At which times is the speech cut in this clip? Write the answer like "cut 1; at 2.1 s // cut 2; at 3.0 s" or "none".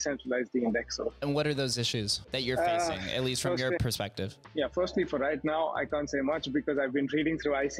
cut 1; at 1.2 s // cut 2; at 2.2 s // cut 3; at 3.8 s